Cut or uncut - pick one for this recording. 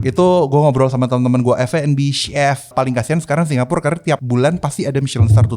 cut